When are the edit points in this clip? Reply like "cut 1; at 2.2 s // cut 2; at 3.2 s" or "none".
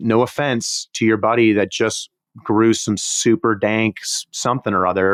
none